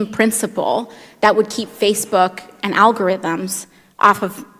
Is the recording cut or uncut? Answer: uncut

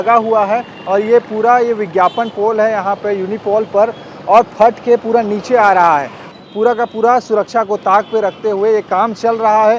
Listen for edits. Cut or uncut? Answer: cut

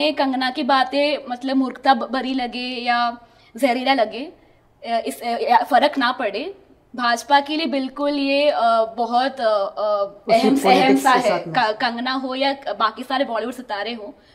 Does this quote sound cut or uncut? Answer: uncut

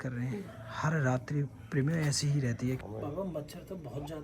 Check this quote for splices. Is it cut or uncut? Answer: cut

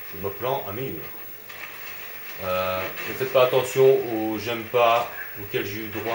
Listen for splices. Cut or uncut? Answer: cut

